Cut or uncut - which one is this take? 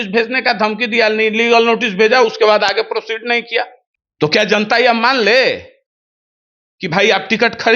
cut